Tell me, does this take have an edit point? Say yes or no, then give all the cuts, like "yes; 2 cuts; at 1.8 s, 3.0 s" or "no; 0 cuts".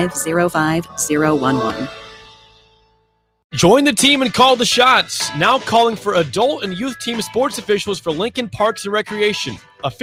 no; 0 cuts